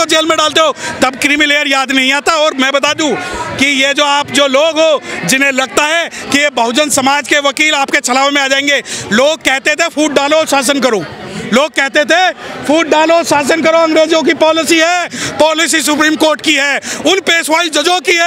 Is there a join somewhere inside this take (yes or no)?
no